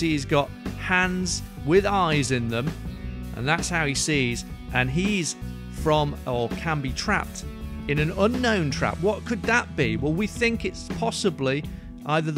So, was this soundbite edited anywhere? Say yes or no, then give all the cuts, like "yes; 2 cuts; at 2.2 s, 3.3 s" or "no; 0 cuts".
no; 0 cuts